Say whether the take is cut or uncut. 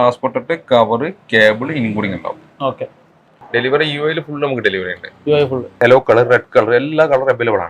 cut